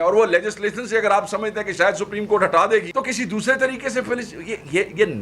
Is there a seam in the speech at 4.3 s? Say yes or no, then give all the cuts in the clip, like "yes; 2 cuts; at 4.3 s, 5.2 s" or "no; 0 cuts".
no; 1 cut; at 2.9 s